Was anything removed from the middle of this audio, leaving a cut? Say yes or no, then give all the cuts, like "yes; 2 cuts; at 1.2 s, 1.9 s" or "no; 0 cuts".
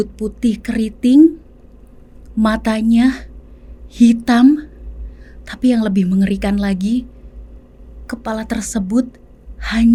no; 0 cuts